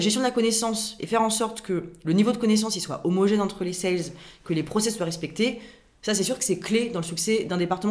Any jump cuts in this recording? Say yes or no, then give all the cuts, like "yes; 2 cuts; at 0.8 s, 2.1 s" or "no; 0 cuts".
no; 0 cuts